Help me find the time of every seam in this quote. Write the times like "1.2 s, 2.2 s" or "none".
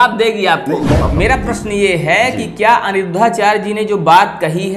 1.0 s

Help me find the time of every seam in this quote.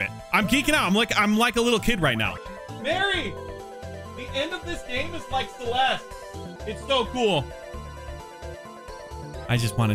2.4 s, 6.5 s

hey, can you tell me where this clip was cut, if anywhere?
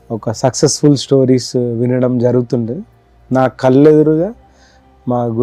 none

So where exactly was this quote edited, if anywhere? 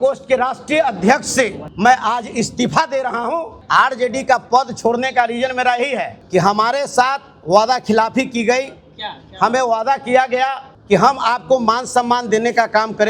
1.6 s, 3.6 s, 6.2 s, 10.7 s

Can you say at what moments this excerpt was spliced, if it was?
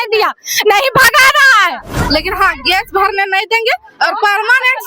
2.0 s

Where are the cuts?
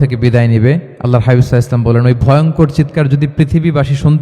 0.9 s

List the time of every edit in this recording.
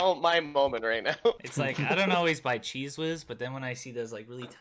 1.5 s

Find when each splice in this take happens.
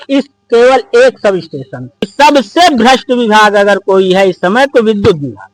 2.0 s

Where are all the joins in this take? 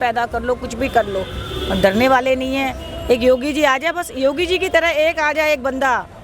none

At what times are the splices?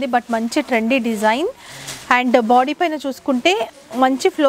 none

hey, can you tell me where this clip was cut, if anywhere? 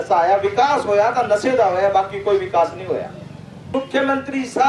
3.7 s

